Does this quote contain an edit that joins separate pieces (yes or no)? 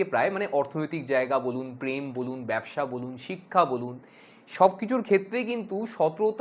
no